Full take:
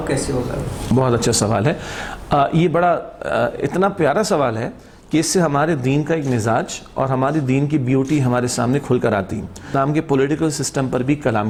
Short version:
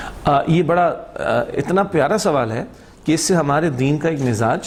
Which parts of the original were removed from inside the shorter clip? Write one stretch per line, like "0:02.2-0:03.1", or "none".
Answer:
none